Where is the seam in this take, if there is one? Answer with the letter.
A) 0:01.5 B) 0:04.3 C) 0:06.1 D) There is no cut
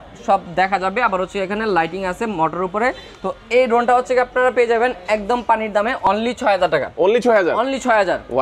C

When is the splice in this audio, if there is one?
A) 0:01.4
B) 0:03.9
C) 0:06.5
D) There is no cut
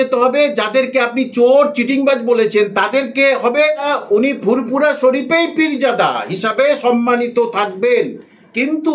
B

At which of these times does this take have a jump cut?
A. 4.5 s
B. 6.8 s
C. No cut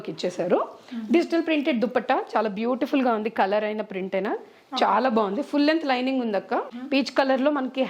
B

